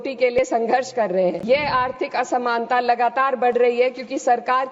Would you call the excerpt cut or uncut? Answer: cut